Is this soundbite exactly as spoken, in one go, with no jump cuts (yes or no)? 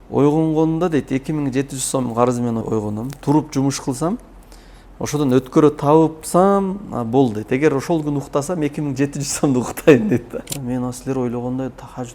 no